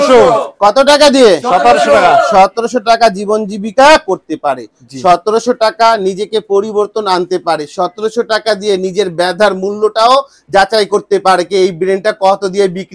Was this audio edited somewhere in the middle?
no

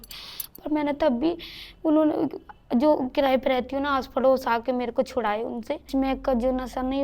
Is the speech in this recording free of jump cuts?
no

